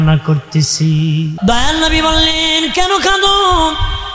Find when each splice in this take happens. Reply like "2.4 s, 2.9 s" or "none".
1.3 s